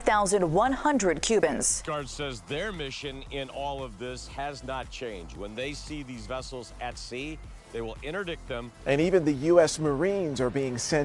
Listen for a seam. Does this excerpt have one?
no; 0 cuts

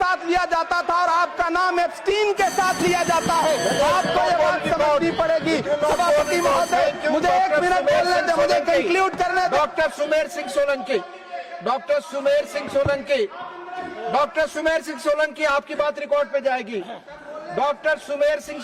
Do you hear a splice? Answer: no; 0 cuts

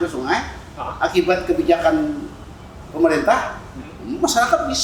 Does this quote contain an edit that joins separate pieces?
no; 0 cuts

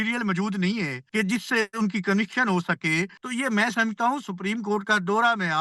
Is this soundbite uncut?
no; 2 cuts; at 1.0 s, 3.2 s

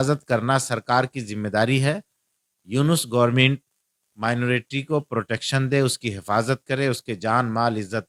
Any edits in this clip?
no; 0 cuts

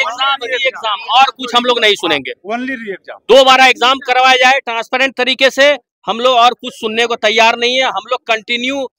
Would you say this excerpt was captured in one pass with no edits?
yes; 0 cuts

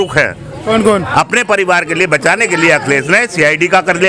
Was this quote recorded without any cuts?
no; 1 cut; at 1.1 s

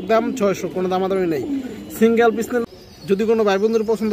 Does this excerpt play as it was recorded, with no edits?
no; 1 cut; at 2.6 s

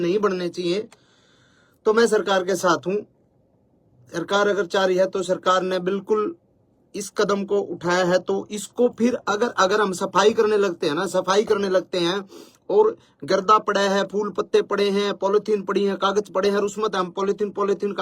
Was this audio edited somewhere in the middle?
no; 0 cuts

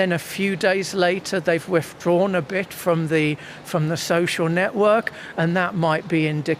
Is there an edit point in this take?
no; 0 cuts

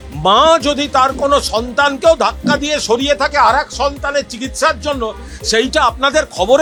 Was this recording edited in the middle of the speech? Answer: no; 0 cuts

